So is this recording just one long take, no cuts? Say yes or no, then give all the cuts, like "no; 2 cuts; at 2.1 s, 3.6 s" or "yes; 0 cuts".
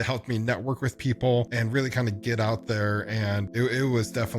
no; 1 cut; at 3.4 s